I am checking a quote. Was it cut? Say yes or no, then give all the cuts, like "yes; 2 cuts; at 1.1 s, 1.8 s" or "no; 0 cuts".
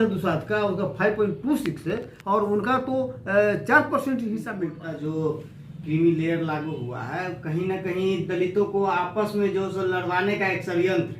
yes; 1 cut; at 4.8 s